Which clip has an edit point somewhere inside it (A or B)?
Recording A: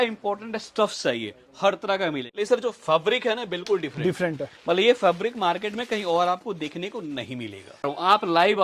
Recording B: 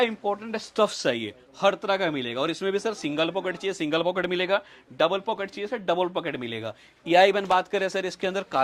A